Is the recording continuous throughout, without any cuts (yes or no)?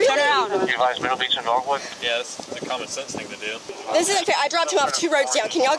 no